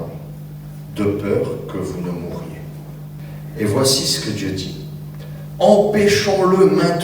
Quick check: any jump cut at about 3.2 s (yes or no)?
yes